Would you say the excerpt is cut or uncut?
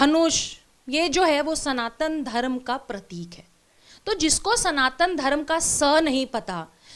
uncut